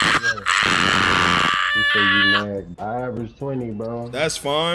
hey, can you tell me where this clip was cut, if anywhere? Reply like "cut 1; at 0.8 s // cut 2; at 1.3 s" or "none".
cut 1; at 2.7 s